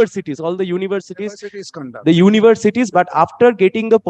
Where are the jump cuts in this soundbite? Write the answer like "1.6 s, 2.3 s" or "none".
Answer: none